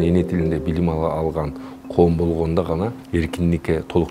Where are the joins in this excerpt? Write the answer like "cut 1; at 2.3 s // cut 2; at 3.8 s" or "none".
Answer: cut 1; at 3.0 s